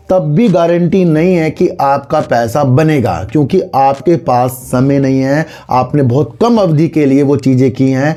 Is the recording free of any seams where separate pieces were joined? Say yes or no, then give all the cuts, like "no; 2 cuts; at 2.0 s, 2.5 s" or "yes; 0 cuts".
yes; 0 cuts